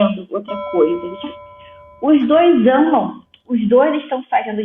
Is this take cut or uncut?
cut